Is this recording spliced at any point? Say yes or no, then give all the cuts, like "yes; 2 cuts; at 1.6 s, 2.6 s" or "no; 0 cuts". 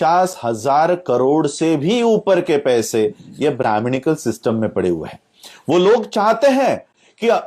no; 0 cuts